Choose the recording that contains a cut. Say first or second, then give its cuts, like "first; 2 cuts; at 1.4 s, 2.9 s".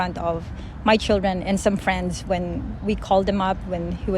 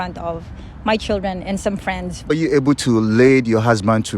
second; 1 cut; at 2.3 s